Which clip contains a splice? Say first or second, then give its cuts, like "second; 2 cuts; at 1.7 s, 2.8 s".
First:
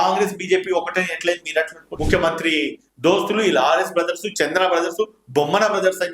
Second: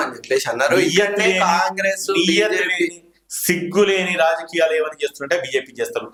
first; 1 cut; at 1.9 s